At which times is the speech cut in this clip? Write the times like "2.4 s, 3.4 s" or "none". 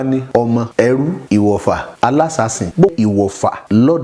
2.9 s